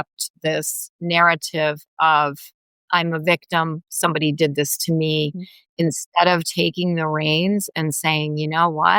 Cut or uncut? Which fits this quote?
uncut